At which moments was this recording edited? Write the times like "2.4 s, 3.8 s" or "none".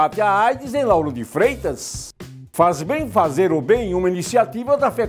2.1 s